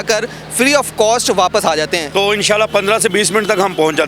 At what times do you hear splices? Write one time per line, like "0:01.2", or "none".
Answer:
0:02.0